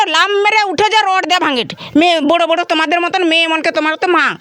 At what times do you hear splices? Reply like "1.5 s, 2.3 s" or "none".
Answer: none